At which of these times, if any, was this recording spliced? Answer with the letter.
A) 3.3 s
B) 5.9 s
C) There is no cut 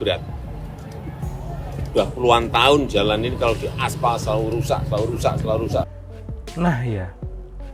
B